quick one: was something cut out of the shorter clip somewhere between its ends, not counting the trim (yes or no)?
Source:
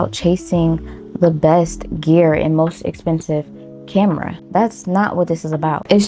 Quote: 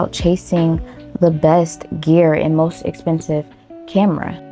no